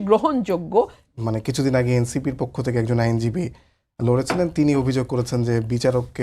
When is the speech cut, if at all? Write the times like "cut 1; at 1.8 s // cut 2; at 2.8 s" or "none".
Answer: cut 1; at 1.1 s